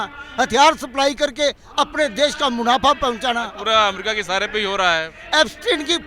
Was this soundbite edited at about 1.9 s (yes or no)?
no